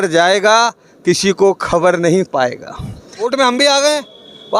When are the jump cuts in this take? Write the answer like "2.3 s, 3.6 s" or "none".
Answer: 3.3 s